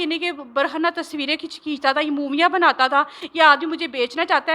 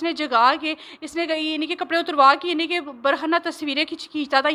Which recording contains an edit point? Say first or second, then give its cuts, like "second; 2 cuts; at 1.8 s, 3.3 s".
first; 1 cut; at 3.2 s